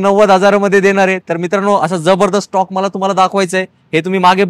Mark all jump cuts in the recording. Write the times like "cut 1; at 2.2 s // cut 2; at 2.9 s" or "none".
none